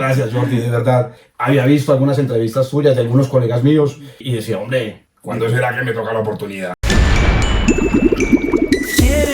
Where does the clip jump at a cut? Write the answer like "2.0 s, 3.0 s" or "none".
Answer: 1.2 s, 4.2 s, 5.1 s, 6.8 s